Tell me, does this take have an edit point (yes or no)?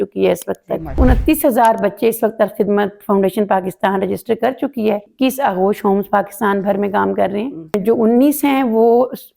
yes